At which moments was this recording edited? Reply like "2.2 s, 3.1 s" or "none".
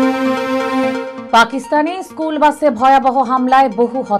none